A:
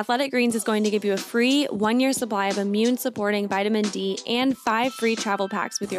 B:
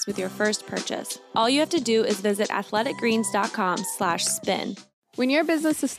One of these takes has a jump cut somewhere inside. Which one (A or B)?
B